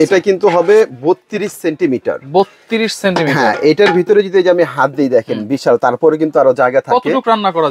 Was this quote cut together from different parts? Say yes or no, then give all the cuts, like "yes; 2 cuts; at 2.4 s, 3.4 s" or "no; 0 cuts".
no; 0 cuts